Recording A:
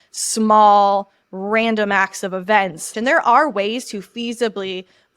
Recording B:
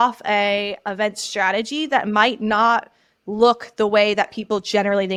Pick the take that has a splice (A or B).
A